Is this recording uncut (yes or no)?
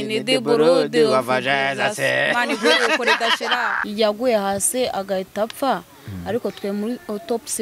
no